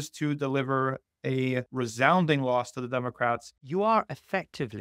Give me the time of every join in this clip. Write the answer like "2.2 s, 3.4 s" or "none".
1.7 s, 3.5 s